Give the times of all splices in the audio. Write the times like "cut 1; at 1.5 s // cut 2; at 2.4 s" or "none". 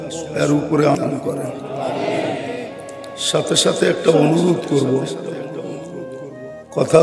cut 1; at 1.0 s